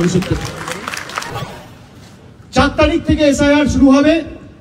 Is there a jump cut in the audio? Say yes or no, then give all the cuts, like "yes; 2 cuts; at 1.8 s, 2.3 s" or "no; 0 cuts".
yes; 1 cut; at 1.3 s